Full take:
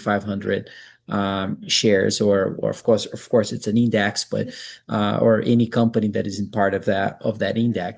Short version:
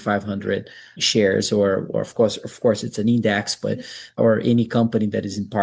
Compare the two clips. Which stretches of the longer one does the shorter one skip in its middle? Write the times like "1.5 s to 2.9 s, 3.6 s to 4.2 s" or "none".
1.0 s to 1.6 s, 4.8 s to 5.1 s